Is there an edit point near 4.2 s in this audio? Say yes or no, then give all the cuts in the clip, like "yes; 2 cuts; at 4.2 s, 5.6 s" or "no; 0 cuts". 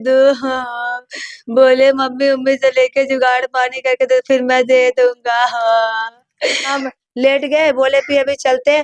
no; 1 cut; at 6.8 s